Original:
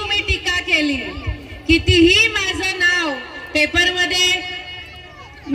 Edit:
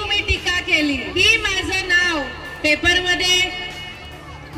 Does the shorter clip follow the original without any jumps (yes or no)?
no